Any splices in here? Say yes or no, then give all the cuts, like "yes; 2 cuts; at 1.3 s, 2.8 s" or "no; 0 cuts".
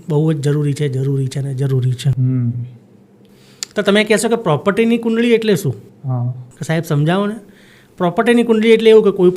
no; 0 cuts